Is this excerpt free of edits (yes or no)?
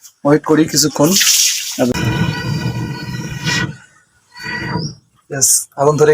no